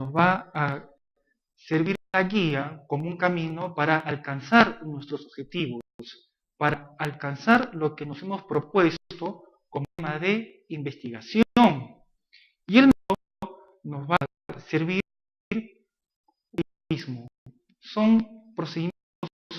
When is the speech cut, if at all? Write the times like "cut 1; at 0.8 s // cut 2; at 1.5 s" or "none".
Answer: cut 1; at 4.4 s